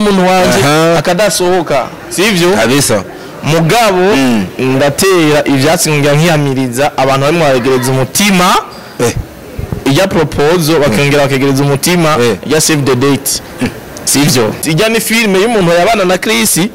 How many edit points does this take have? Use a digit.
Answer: 1